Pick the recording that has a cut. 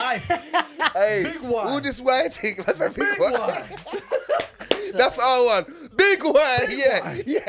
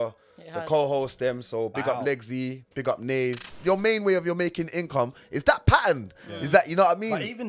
second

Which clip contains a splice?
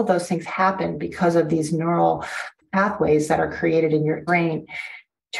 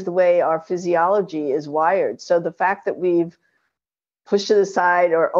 first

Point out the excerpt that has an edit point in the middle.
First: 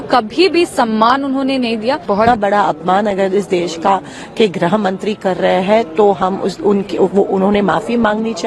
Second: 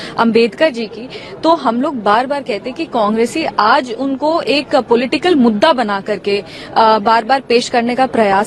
first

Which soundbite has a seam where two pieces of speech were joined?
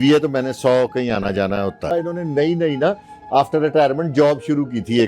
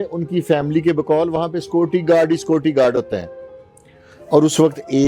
first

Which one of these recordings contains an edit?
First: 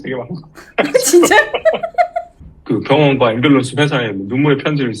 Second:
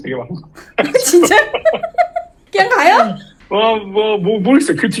first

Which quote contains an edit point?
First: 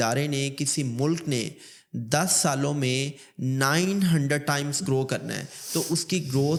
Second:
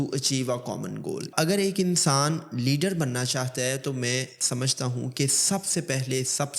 second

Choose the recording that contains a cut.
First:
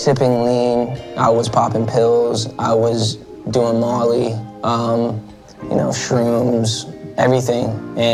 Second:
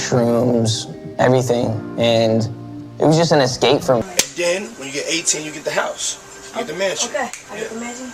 second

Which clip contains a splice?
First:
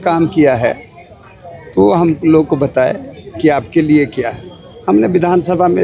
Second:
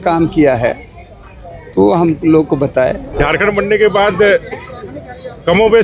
second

